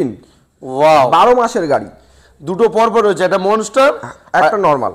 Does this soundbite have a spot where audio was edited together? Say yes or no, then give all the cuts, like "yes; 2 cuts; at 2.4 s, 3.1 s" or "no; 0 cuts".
no; 0 cuts